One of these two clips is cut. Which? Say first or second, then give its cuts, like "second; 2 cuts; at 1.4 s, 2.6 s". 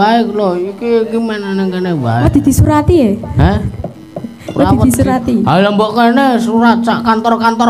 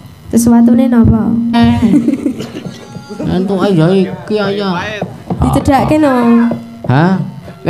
second; 1 cut; at 1.6 s